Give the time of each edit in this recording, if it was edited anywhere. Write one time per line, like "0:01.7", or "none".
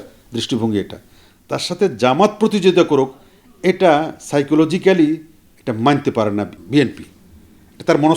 0:06.6